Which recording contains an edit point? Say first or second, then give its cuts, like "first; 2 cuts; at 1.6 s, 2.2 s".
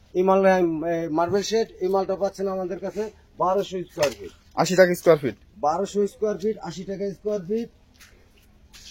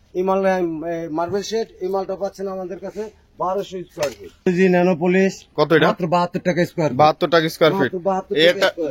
second; 1 cut; at 4.5 s